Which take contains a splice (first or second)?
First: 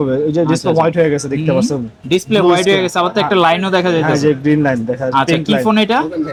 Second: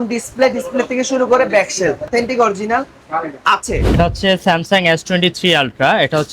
second